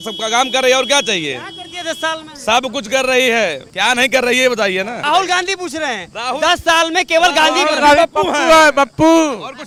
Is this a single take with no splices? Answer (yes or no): yes